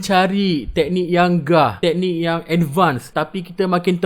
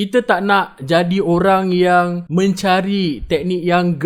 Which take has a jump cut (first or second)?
first